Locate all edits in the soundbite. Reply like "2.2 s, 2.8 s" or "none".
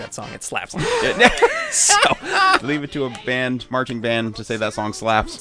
2.6 s